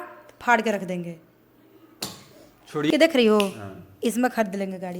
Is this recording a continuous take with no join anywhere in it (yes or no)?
no